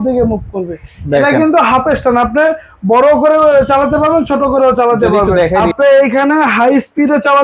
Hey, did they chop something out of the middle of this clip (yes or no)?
yes